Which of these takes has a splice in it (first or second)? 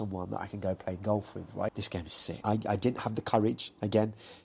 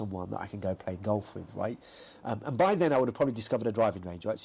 first